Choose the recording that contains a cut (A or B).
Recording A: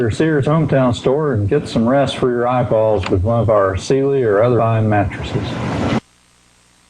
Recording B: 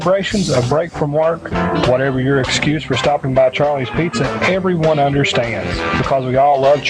A